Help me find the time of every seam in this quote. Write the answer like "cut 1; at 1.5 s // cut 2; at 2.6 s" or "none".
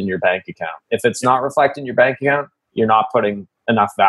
none